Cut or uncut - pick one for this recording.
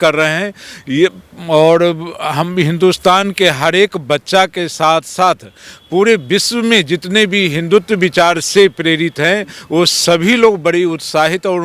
uncut